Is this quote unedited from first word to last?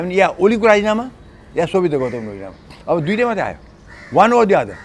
yes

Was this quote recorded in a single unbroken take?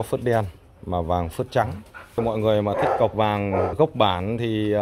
no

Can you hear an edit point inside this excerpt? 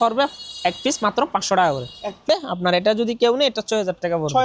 yes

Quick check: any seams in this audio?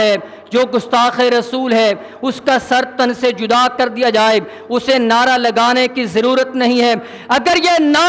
no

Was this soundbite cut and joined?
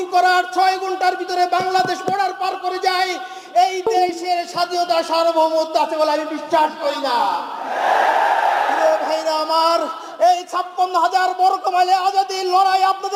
no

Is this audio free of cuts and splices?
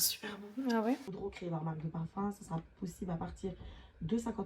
no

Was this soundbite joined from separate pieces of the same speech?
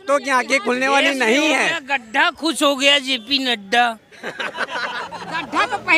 no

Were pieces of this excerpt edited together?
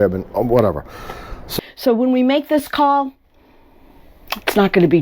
yes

